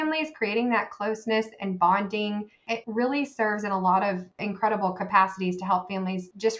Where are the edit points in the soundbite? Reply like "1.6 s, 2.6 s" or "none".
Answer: none